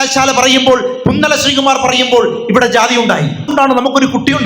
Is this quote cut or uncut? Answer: cut